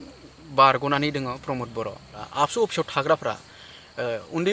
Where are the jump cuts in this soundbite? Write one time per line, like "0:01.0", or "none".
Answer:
0:02.2

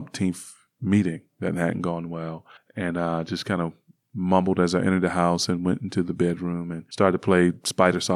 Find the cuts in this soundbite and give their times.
0:06.8

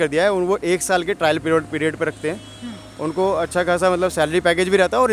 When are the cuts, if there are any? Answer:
none

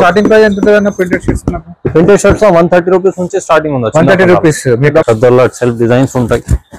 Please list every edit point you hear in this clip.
0:05.0

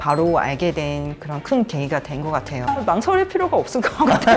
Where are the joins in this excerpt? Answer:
0:02.6

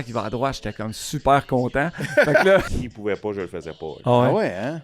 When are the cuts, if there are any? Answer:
0:02.8
0:04.0

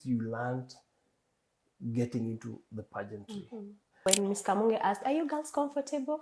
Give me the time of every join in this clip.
0:04.0

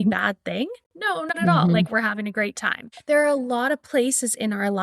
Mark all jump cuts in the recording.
0:02.9

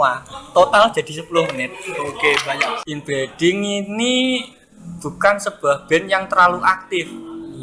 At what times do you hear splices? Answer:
0:02.8

